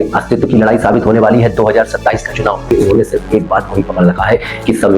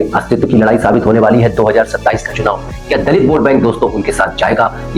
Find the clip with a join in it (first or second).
first